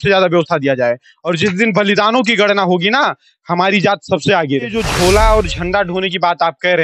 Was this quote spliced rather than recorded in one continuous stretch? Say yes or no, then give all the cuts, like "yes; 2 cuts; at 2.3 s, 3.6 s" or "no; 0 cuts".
yes; 1 cut; at 4.7 s